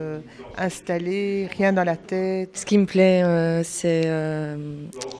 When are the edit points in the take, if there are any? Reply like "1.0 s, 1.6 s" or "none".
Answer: 2.5 s